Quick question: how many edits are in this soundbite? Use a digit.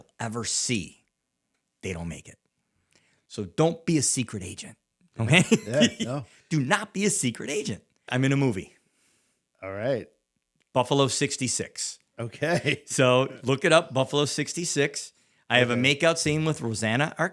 2